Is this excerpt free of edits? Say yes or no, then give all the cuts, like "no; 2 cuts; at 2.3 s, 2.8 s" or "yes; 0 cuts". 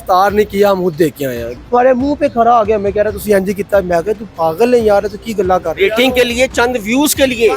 no; 1 cut; at 1.5 s